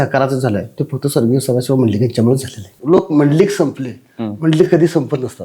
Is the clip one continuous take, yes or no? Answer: no